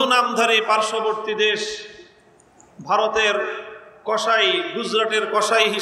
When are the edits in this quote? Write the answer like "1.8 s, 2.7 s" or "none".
none